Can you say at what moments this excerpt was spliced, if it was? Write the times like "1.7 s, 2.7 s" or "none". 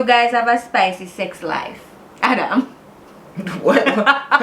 none